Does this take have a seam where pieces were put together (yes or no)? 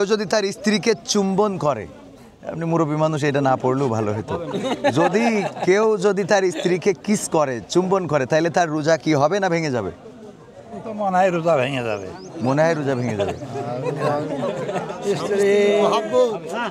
no